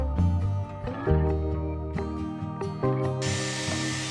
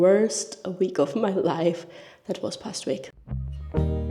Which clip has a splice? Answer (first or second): second